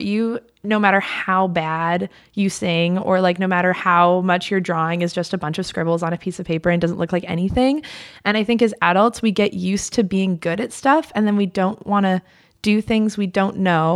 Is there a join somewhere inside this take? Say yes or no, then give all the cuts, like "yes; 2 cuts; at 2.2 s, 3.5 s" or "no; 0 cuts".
no; 0 cuts